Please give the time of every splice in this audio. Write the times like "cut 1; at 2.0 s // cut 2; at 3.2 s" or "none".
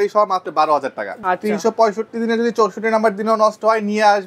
cut 1; at 1.1 s